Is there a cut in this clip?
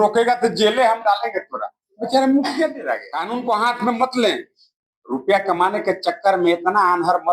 yes; 1 cut; at 3.1 s

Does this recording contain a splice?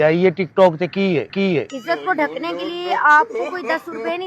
yes; 1 cut; at 1.7 s

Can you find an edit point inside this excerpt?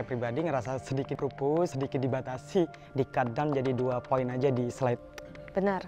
yes; 2 cuts; at 2.8 s, 5.1 s

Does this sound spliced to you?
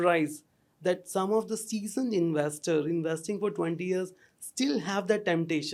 no; 0 cuts

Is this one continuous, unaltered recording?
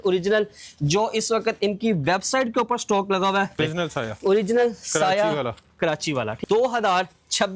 no; 2 cuts; at 3.6 s, 6.4 s

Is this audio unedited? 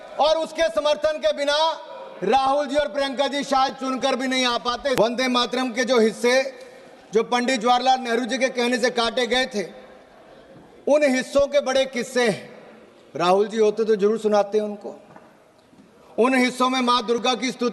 no; 1 cut; at 5.0 s

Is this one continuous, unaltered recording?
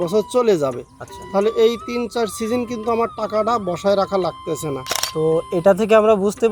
no; 1 cut; at 5.0 s

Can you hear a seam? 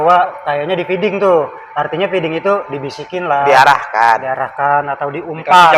no; 0 cuts

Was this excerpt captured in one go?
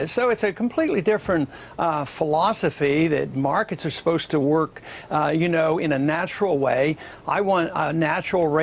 yes; 0 cuts

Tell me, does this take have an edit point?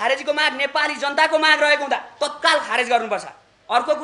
no; 0 cuts

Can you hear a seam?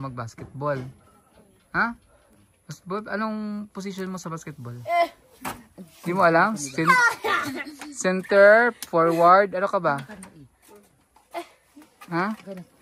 no; 0 cuts

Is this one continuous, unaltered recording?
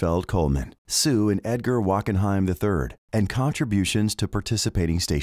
yes; 0 cuts

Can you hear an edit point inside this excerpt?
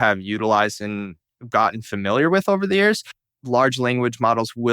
yes; 1 cut; at 3.1 s

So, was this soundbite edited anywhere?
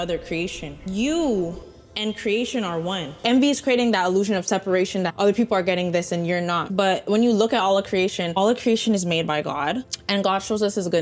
yes; 1 cut; at 3.2 s

